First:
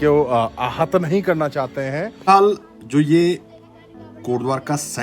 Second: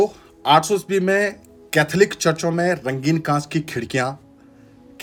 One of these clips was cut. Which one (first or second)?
first